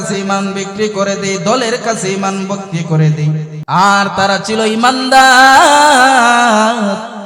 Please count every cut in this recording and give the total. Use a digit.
1